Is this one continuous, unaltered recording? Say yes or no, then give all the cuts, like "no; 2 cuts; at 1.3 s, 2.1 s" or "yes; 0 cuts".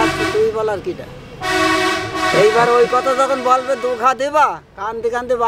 yes; 0 cuts